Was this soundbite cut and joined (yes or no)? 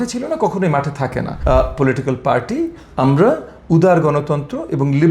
yes